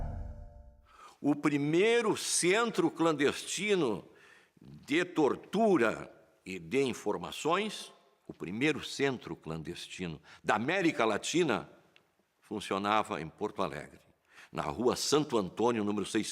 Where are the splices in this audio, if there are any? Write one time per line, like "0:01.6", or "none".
0:11.7